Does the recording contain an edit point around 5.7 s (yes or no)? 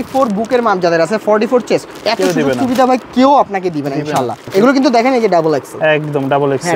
no